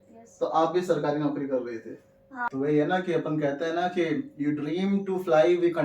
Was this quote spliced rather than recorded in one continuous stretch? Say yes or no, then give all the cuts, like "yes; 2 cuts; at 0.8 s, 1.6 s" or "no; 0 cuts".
yes; 1 cut; at 2.3 s